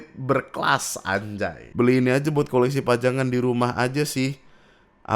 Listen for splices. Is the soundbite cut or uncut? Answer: cut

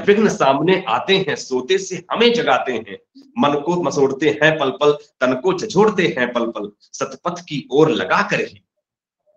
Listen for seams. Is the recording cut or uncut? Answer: uncut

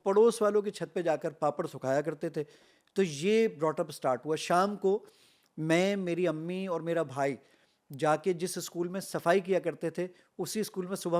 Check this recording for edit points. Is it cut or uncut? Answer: uncut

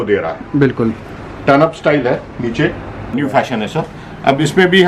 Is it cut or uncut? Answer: cut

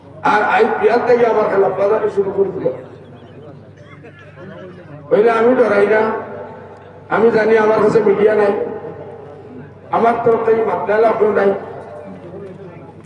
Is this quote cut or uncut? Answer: uncut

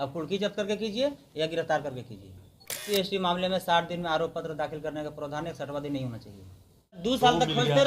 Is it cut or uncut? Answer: cut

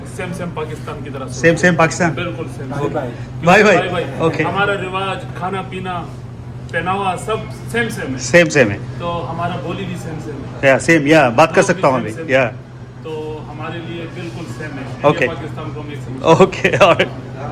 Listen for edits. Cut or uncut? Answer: uncut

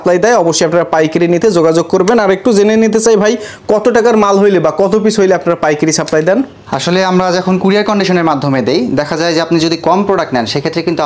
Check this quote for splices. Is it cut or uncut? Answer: uncut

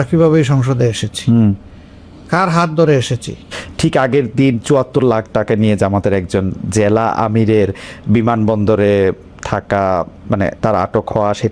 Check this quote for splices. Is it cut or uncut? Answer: cut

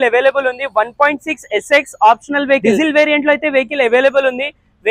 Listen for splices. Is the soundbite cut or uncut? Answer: uncut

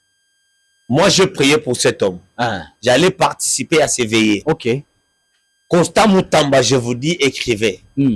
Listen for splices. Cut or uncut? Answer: cut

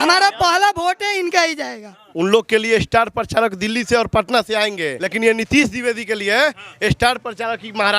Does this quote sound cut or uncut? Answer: cut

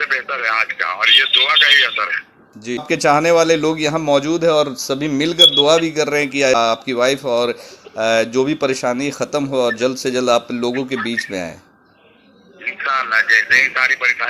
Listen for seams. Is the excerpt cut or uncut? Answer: cut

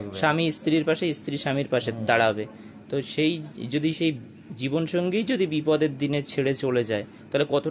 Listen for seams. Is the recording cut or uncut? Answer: uncut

